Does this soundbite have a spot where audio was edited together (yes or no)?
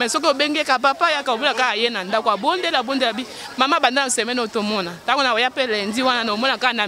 no